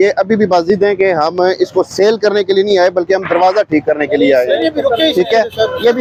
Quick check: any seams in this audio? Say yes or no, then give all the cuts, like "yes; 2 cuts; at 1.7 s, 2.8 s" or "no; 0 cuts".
no; 0 cuts